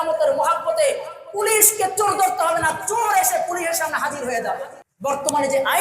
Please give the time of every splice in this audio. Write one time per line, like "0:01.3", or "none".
0:04.8